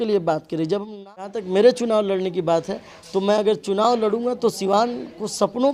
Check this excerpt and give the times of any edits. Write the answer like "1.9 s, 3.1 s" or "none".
0.9 s